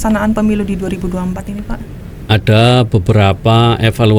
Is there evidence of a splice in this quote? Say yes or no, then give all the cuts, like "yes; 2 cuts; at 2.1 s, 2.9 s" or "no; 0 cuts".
no; 0 cuts